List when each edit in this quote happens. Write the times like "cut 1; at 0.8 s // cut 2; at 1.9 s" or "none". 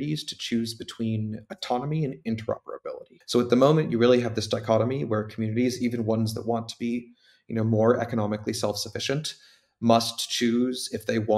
cut 1; at 3.1 s

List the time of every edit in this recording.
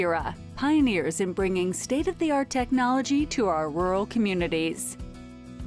cut 1; at 4.8 s

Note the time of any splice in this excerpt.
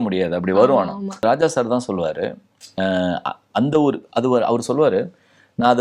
cut 1; at 1.2 s

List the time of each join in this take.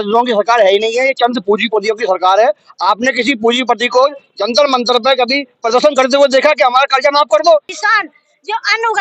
cut 1; at 7.7 s

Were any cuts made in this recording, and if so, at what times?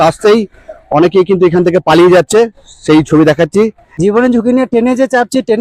cut 1; at 3.9 s

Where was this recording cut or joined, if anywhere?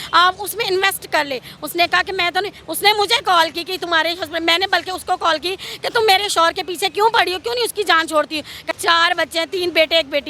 cut 1; at 8.6 s

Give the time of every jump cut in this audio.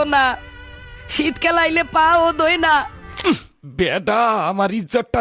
cut 1; at 3.1 s

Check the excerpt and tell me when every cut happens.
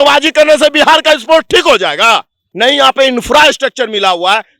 cut 1; at 2.4 s

